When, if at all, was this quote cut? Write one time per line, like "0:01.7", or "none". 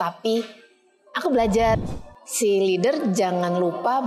0:01.8